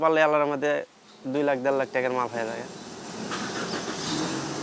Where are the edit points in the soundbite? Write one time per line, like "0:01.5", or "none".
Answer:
none